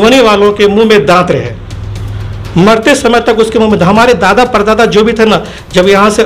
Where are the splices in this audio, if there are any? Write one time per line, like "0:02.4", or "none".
none